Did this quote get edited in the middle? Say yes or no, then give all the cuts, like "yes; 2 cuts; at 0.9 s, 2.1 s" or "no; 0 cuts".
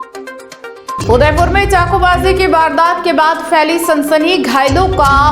yes; 1 cut; at 0.9 s